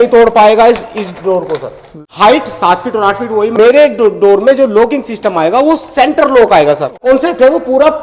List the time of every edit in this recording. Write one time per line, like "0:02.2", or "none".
0:02.0
0:03.5
0:07.0